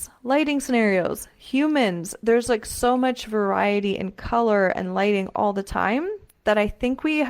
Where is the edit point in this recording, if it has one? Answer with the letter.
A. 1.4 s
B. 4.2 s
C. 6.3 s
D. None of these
D